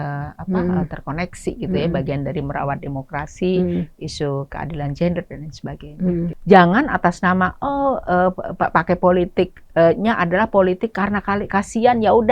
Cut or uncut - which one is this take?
cut